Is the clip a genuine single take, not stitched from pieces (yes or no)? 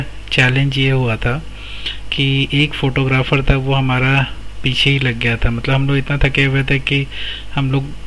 yes